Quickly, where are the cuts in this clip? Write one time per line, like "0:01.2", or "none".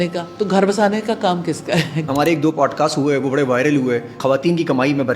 0:02.1
0:04.2

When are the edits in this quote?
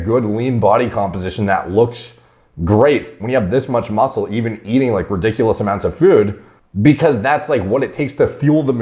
none

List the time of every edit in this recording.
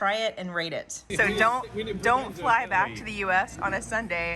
0:01.1

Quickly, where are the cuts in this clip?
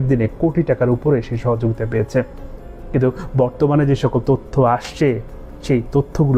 none

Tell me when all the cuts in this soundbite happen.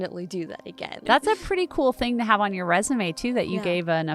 0:01.0

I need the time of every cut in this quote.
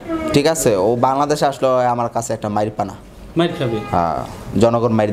none

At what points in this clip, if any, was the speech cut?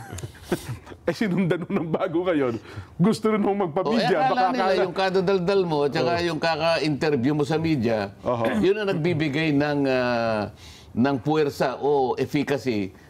none

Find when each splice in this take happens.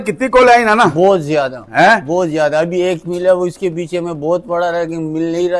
none

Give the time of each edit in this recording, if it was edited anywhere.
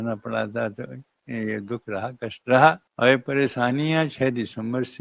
0:02.9

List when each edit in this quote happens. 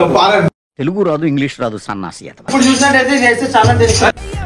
0:02.5

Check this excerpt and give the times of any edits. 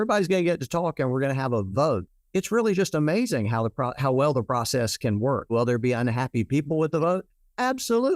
0:02.1
0:05.5

